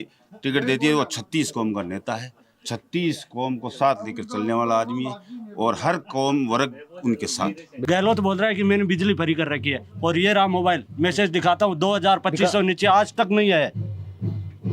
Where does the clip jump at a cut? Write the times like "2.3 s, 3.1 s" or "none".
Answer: 7.7 s